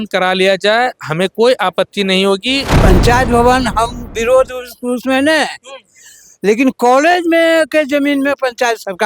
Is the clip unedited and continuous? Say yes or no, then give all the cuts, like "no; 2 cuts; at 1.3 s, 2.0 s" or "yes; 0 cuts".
no; 1 cut; at 2.7 s